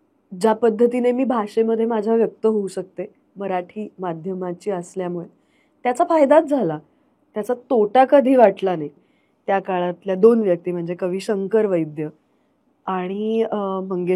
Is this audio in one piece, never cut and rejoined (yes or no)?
no